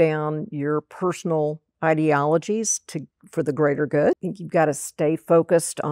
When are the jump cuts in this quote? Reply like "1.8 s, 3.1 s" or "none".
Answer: 4.3 s